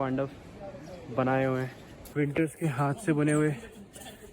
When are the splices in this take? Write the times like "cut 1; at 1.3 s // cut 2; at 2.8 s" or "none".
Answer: cut 1; at 2.1 s